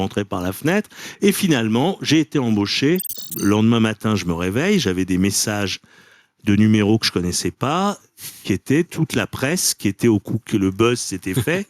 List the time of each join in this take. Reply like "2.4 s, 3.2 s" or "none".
3.2 s